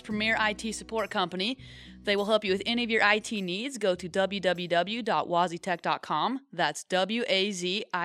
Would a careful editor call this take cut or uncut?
uncut